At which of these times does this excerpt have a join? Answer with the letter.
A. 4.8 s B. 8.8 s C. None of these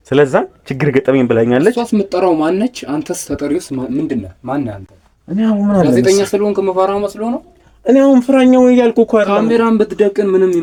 C